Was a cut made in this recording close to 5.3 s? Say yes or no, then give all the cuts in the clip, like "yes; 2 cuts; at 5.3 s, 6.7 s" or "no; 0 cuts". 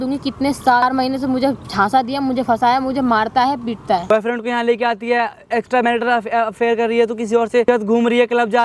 no; 3 cuts; at 0.8 s, 4.1 s, 7.6 s